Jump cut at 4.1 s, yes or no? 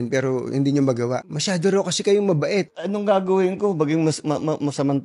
no